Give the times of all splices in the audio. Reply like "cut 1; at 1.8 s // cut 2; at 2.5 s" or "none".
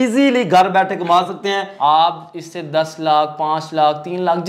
cut 1; at 1.7 s